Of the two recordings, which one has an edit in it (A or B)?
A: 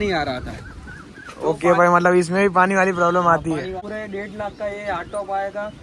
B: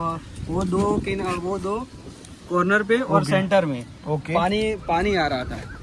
A